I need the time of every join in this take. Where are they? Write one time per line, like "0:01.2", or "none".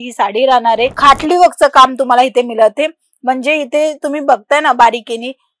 0:00.9